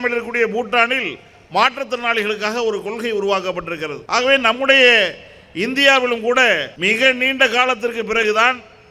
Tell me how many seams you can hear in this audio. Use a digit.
2